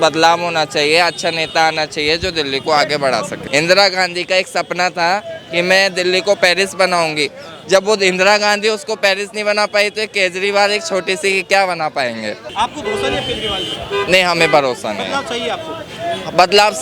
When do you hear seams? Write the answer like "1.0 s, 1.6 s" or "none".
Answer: 3.4 s, 12.4 s